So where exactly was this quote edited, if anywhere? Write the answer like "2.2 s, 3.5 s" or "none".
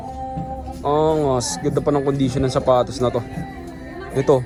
none